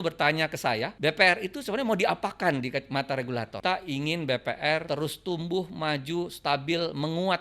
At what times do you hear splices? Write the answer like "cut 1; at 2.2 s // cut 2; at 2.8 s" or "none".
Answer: cut 1; at 0.9 s // cut 2; at 3.6 s // cut 3; at 4.8 s